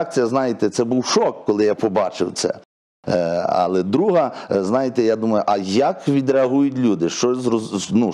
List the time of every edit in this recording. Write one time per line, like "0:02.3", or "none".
none